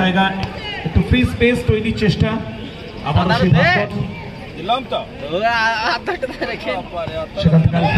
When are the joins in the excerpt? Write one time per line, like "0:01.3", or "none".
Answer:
none